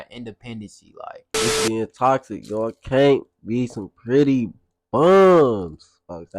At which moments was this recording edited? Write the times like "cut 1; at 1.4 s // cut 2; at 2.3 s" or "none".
cut 1; at 1.3 s